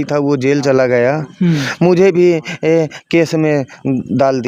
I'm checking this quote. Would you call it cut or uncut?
uncut